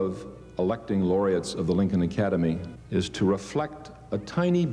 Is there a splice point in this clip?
yes; 1 cut; at 2.7 s

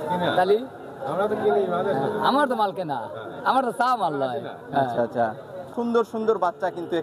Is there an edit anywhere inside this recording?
yes; 1 cut; at 5.7 s

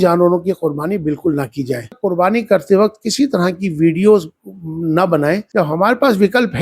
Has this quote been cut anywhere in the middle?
yes; 2 cuts; at 1.9 s, 5.5 s

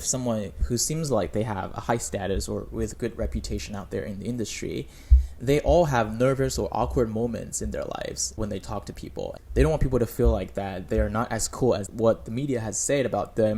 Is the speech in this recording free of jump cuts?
yes; 0 cuts

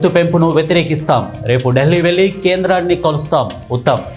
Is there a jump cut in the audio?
no; 0 cuts

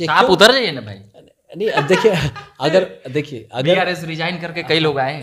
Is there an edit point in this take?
no; 0 cuts

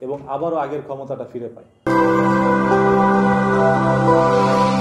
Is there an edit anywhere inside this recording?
no; 0 cuts

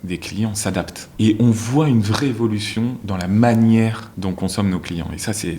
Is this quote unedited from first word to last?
no; 2 cuts; at 1.0 s, 4.1 s

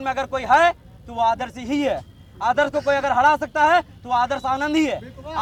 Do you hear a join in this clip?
no; 0 cuts

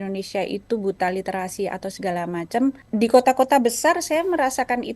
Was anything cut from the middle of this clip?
yes; 1 cut; at 2.8 s

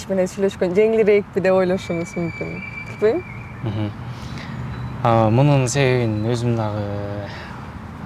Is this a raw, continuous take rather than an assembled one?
yes; 0 cuts

